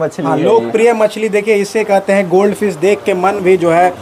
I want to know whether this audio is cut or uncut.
uncut